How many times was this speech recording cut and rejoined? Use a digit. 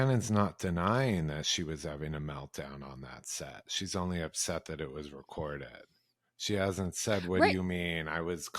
0